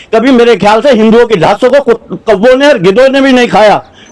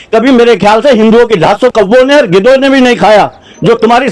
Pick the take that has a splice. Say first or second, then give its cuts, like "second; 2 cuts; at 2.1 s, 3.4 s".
second; 1 cut; at 1.7 s